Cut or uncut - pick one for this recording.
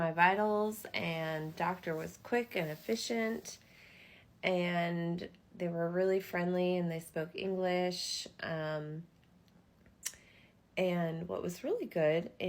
uncut